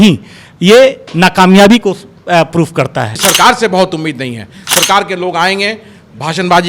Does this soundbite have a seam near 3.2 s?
yes; 1 cut; at 3.2 s

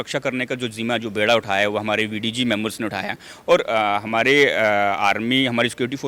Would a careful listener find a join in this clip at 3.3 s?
no; 0 cuts

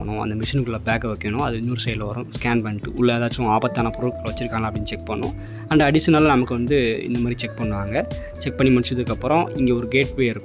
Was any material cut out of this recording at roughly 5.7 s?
no; 0 cuts

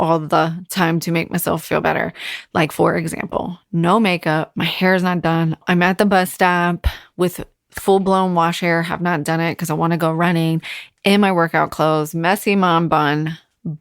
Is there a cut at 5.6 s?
yes; 1 cut; at 5.6 s

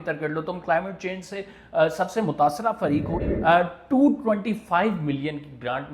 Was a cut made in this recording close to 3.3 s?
yes; 1 cut; at 3.3 s

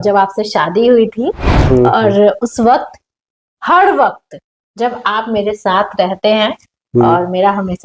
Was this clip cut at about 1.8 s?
no; 0 cuts

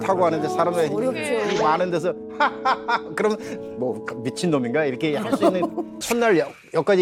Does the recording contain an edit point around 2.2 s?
no; 1 cut; at 6.0 s

